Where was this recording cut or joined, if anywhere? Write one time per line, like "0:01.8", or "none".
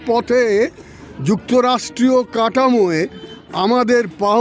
none